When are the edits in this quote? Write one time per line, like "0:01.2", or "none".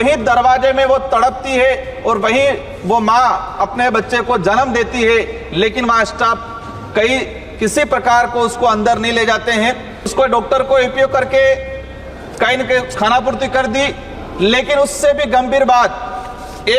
0:10.1